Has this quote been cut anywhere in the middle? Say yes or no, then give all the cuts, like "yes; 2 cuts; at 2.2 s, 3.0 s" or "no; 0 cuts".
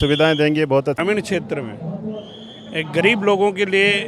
yes; 1 cut; at 1.0 s